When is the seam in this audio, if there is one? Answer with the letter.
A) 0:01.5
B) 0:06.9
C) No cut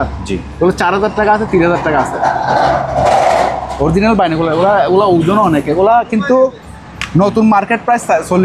C